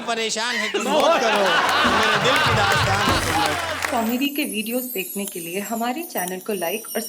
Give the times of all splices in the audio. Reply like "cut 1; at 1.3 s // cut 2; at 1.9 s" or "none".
cut 1; at 3.8 s